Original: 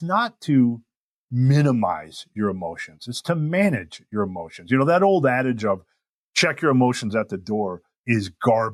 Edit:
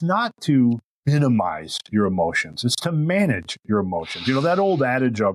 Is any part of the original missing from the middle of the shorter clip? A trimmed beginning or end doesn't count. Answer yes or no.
yes